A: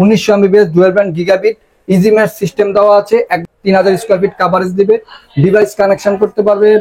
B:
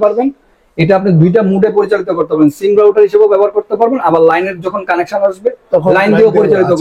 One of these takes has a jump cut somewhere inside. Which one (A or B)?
A